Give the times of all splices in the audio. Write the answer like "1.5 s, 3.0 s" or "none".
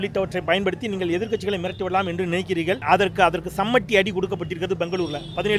2.8 s